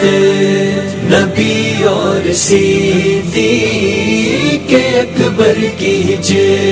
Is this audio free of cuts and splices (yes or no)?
yes